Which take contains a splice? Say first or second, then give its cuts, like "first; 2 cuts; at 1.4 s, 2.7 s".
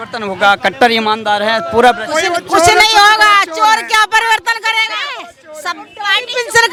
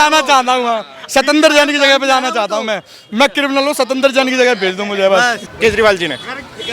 second; 1 cut; at 5.4 s